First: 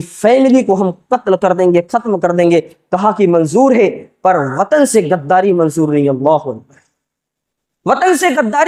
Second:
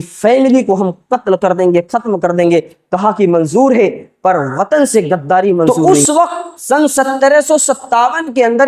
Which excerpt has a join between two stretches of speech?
second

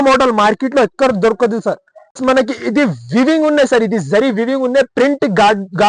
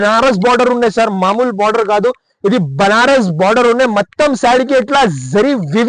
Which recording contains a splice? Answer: first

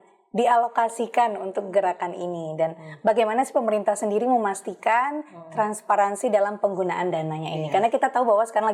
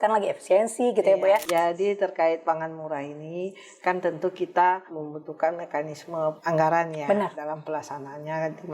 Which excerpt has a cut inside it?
second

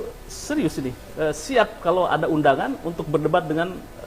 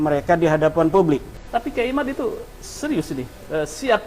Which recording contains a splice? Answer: second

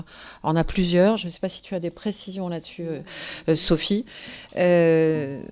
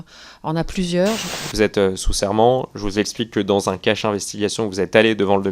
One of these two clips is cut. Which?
second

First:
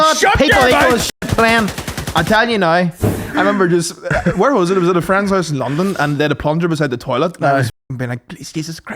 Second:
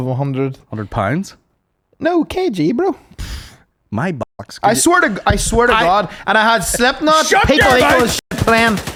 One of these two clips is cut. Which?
first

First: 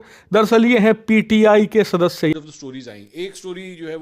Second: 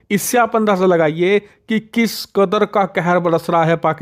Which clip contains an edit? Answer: first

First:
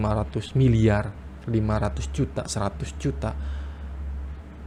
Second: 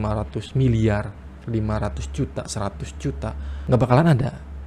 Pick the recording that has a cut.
second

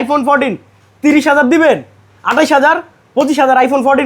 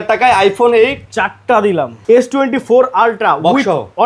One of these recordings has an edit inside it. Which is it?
second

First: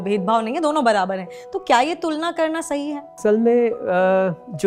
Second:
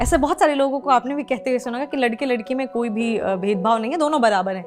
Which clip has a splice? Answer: first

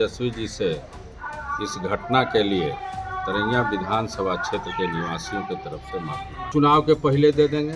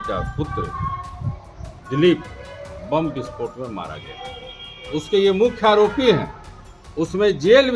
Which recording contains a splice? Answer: first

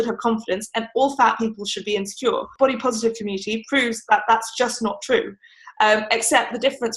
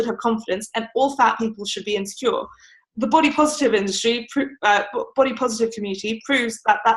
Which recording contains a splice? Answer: first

